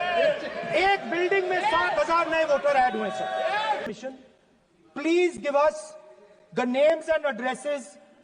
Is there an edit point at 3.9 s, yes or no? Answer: yes